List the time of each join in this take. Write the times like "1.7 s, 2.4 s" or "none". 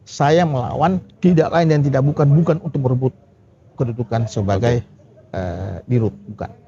1.1 s